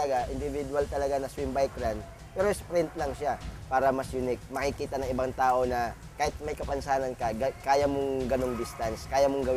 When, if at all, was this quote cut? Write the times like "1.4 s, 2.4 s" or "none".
3.5 s, 6.0 s